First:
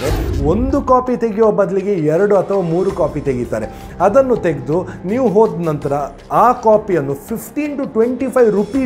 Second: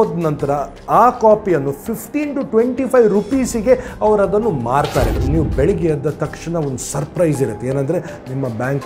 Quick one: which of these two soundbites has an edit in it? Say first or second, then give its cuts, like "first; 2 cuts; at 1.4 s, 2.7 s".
second; 1 cut; at 5.2 s